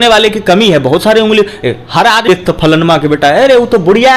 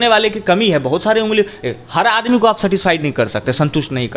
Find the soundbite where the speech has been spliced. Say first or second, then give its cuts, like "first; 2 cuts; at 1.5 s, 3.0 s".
first; 1 cut; at 2.2 s